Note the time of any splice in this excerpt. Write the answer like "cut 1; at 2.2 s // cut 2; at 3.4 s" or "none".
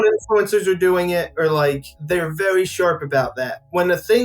cut 1; at 1.9 s